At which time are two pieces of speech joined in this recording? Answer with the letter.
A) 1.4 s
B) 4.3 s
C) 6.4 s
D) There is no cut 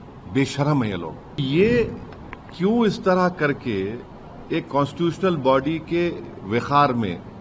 A